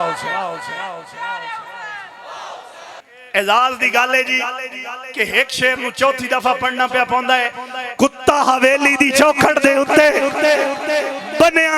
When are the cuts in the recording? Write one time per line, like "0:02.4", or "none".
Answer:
0:03.1